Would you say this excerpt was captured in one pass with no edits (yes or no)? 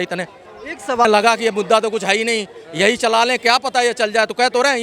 no